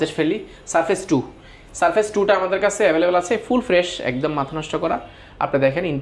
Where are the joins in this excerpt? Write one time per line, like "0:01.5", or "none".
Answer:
none